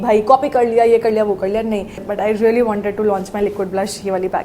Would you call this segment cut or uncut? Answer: cut